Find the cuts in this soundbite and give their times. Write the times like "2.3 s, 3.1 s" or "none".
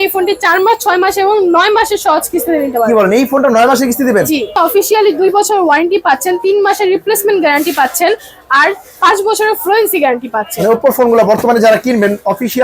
4.5 s